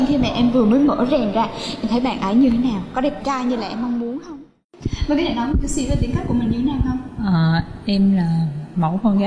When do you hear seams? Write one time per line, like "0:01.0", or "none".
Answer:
0:04.8